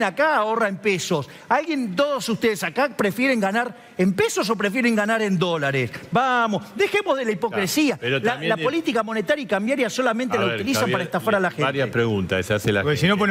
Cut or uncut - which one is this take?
uncut